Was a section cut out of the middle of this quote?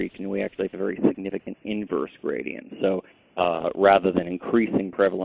no; 0 cuts

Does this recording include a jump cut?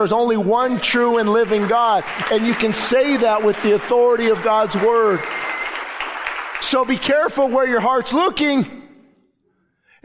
no; 0 cuts

